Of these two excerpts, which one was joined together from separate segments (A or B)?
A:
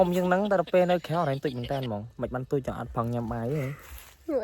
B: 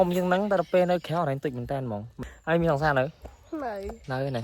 B